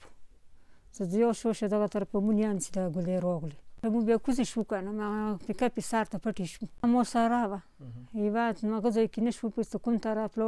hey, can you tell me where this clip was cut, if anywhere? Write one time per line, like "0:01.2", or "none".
0:03.8
0:06.8

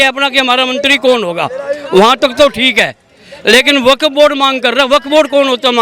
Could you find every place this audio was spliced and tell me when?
none

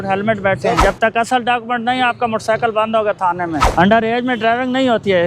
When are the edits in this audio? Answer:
0:00.8
0:03.6

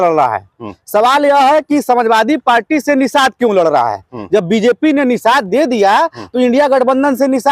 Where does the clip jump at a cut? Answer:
none

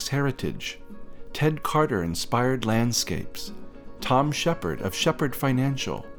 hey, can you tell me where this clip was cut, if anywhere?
none

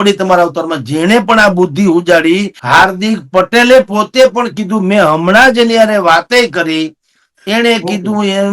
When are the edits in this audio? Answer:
0:02.5

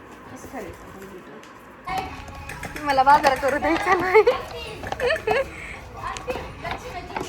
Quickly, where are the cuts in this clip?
0:01.9

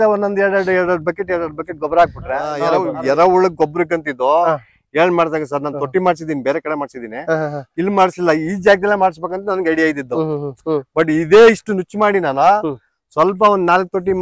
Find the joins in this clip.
0:02.6

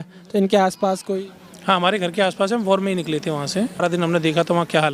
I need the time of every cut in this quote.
0:03.8

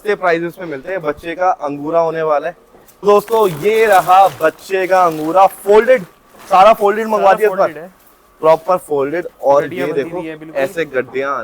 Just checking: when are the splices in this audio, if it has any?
0:03.0

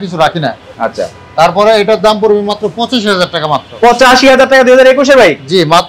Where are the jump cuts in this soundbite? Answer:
none

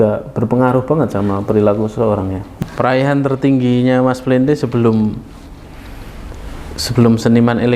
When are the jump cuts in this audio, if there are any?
0:02.6

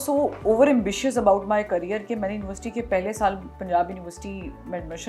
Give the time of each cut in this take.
none

